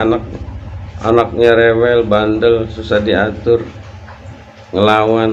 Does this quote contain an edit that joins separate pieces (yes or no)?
no